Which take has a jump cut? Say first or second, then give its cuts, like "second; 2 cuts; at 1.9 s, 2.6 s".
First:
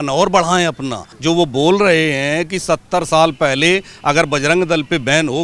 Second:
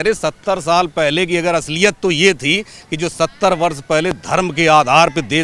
first; 1 cut; at 1.1 s